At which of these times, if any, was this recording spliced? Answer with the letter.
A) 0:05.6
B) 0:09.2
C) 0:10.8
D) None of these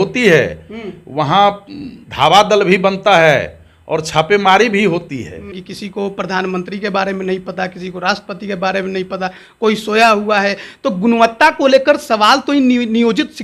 A